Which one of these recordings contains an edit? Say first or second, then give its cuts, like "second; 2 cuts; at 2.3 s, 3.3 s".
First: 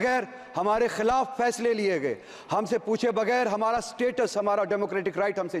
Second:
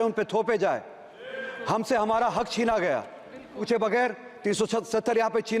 second; 1 cut; at 3.6 s